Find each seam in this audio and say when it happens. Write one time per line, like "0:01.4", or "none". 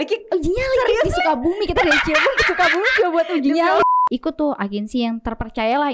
0:03.8